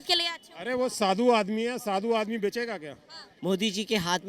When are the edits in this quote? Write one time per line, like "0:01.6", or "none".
0:03.3